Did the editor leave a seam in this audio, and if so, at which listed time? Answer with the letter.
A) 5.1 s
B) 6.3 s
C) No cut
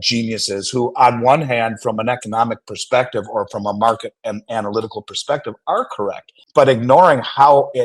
B